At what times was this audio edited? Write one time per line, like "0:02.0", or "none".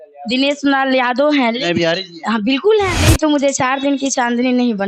0:03.0